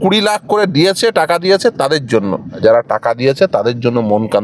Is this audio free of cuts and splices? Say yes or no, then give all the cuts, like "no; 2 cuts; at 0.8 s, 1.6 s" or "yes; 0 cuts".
no; 1 cut; at 2.6 s